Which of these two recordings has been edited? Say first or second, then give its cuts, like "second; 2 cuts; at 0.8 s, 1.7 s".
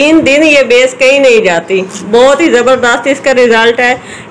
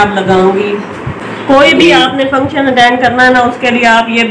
second; 1 cut; at 1.1 s